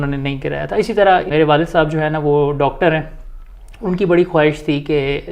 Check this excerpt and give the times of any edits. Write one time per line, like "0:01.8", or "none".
0:01.3